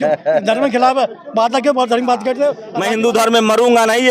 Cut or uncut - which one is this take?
cut